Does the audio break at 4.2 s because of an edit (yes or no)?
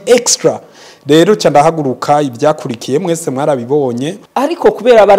yes